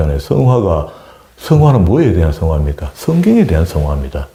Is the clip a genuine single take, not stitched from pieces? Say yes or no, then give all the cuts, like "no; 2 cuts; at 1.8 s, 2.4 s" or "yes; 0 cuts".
yes; 0 cuts